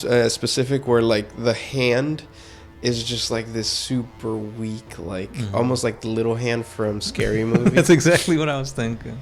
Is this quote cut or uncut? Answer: uncut